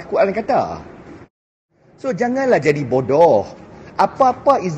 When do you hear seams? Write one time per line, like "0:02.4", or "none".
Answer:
0:01.5

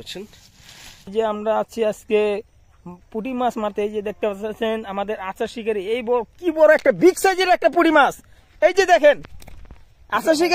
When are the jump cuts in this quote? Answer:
0:01.1

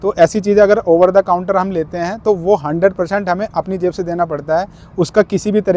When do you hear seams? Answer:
none

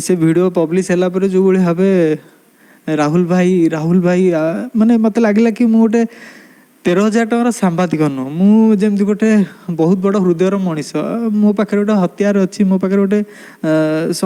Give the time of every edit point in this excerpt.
none

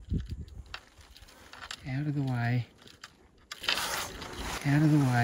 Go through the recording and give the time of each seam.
none

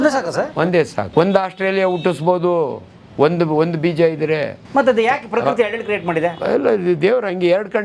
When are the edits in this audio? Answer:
0:00.8
0:04.6

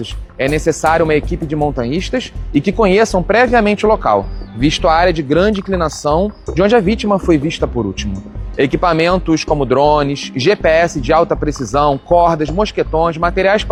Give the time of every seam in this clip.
none

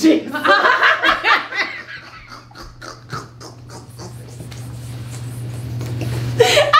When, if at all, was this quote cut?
none

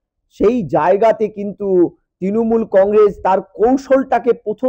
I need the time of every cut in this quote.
none

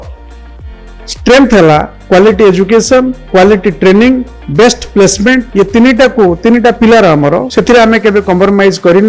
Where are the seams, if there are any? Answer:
0:01.9
0:03.2
0:04.4
0:05.5
0:07.5

